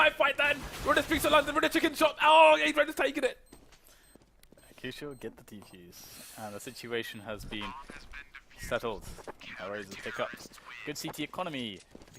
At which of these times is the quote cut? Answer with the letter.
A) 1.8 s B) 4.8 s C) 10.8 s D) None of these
A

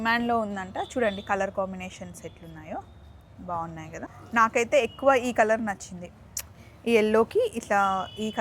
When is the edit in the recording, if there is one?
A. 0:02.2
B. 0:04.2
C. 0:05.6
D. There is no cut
B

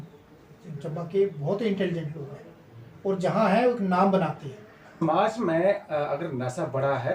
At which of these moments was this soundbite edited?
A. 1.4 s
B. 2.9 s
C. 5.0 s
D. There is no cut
C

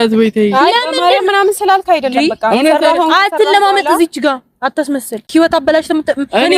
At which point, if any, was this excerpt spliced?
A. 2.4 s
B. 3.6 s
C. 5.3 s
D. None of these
C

